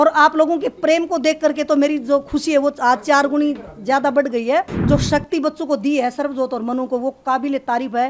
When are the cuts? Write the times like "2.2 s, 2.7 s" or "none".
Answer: 4.8 s

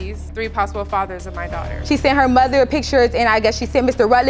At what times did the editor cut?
1.8 s

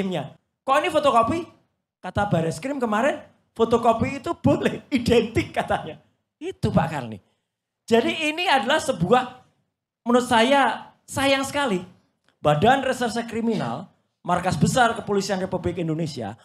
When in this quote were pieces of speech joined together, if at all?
none

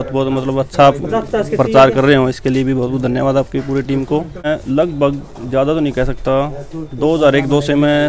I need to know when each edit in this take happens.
4.5 s

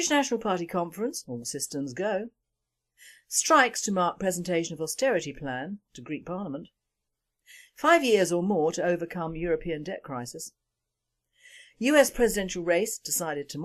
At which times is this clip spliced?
1.1 s

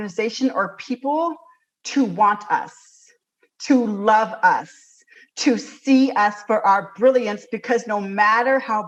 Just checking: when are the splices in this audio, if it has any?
none

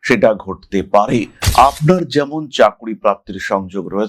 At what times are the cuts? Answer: 1.4 s

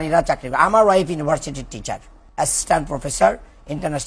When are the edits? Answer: 2.2 s

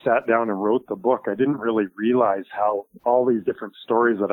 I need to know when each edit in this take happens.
2.9 s

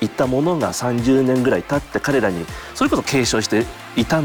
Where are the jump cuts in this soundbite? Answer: none

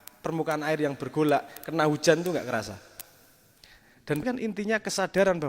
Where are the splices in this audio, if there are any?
4.2 s

